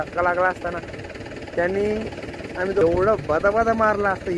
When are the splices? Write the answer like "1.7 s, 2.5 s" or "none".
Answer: 2.8 s